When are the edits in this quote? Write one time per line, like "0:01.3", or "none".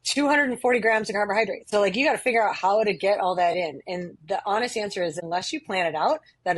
0:01.7
0:05.2